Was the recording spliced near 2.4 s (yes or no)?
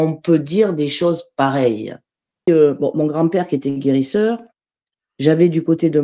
yes